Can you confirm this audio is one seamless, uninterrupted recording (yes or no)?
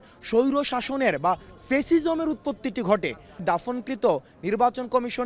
no